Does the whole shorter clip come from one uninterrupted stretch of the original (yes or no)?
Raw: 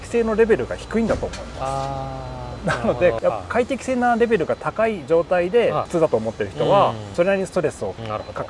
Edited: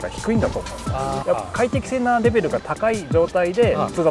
no